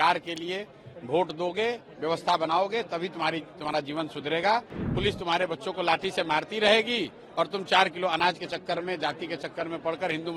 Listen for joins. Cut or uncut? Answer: cut